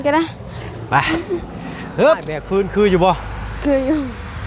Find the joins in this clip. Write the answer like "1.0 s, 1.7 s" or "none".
2.4 s